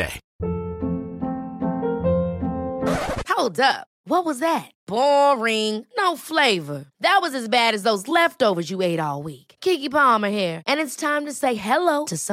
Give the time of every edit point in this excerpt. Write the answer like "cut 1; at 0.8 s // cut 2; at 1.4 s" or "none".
none